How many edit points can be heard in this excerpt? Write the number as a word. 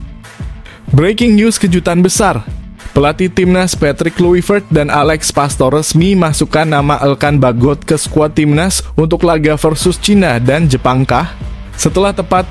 one